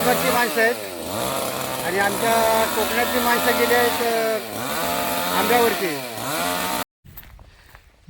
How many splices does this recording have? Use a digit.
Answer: 1